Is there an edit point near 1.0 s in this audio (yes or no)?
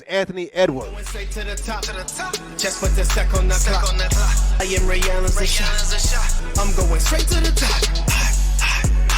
yes